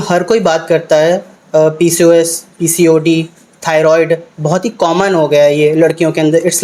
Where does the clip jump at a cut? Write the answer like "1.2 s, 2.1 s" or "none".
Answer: none